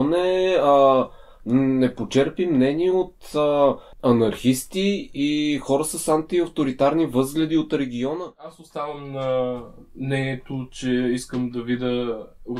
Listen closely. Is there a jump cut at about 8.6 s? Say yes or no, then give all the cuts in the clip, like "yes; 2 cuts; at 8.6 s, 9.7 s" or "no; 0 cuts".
yes; 2 cuts; at 3.9 s, 8.6 s